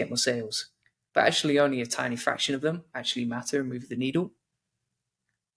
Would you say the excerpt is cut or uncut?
uncut